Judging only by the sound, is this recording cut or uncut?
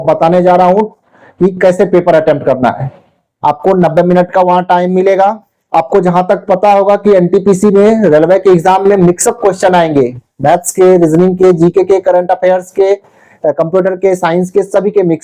uncut